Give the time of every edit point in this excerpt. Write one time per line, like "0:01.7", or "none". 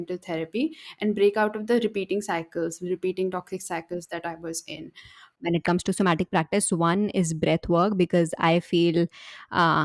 0:05.3

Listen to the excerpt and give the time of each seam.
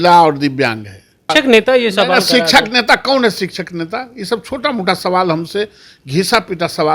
0:01.3

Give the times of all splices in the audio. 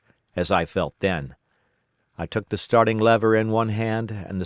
none

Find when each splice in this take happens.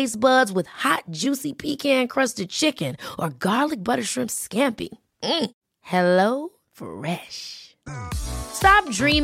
none

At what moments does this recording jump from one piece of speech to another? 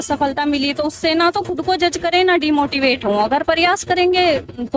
none

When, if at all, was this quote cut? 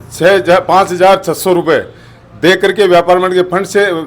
none

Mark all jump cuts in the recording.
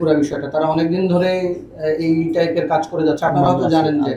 none

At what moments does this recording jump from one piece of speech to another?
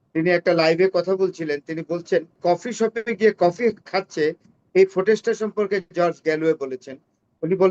0:02.3

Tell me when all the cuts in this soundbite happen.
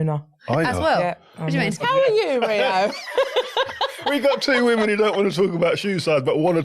0:01.8

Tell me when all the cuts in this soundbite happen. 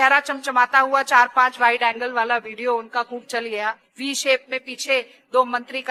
none

